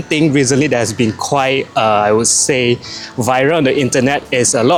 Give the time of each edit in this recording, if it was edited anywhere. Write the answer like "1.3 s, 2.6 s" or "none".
none